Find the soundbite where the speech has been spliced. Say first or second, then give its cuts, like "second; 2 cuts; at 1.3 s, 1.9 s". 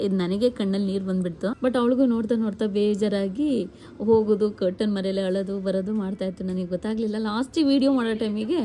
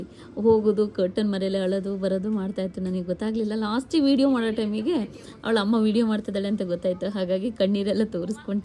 first; 1 cut; at 1.6 s